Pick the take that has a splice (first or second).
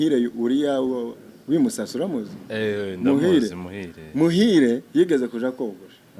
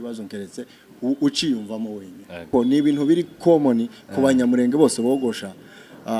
second